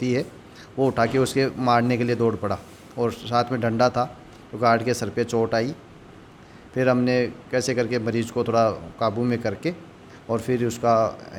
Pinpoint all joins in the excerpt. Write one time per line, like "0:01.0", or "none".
none